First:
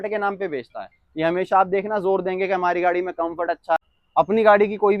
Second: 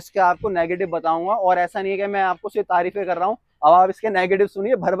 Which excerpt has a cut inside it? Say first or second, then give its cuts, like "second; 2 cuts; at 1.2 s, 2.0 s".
first; 1 cut; at 3.8 s